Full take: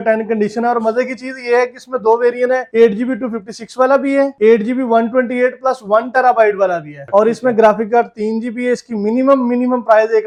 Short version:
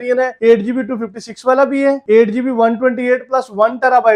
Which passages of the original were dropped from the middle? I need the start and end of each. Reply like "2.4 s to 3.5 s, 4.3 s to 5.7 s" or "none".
none